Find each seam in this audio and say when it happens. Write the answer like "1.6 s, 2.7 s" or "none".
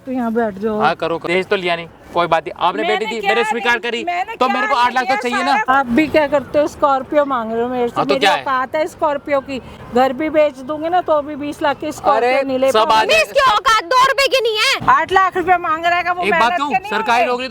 1.2 s, 5.8 s, 14.8 s